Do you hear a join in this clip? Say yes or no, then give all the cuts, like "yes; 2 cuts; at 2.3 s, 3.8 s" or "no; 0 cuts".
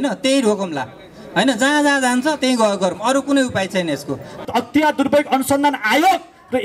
yes; 1 cut; at 4.4 s